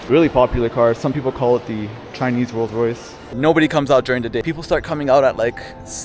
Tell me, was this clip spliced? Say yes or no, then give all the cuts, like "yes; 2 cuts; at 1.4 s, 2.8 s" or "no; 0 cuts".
yes; 2 cuts; at 3.1 s, 4.4 s